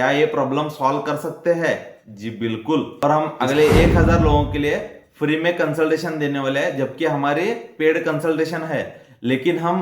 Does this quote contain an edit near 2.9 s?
yes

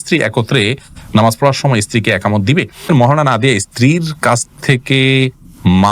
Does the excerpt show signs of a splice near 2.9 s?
yes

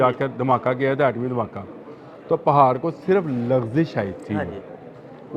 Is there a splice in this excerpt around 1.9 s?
no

